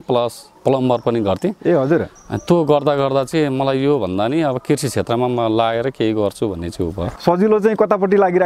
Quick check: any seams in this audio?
yes; 1 cut; at 7.1 s

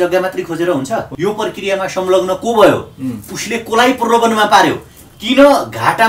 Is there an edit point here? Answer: yes; 1 cut; at 1.1 s

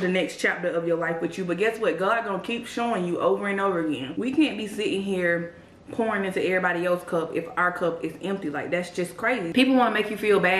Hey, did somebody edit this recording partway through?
yes; 2 cuts; at 4.1 s, 9.5 s

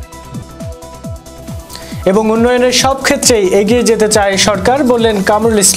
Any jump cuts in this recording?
no; 0 cuts

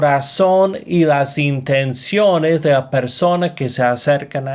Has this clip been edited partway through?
no; 0 cuts

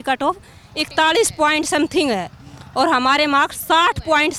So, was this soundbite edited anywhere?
no; 0 cuts

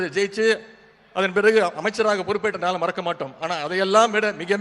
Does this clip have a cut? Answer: no; 0 cuts

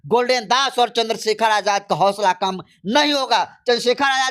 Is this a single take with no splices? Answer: yes; 0 cuts

